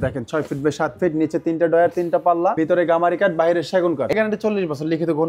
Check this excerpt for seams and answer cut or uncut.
cut